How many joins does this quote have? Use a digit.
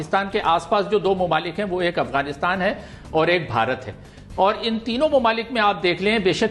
0